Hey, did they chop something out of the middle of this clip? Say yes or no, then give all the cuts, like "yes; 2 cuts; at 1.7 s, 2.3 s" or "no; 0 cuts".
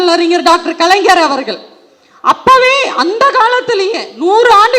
no; 0 cuts